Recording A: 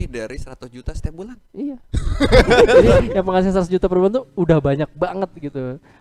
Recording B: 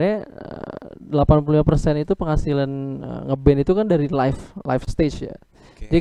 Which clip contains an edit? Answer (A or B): A